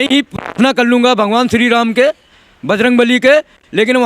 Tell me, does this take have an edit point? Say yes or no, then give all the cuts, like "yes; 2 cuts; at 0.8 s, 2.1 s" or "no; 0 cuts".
no; 0 cuts